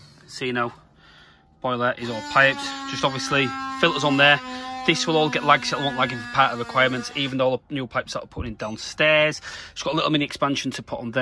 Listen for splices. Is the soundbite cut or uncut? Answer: uncut